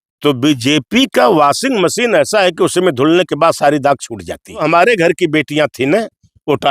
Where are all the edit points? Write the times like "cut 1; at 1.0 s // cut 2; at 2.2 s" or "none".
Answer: cut 1; at 4.6 s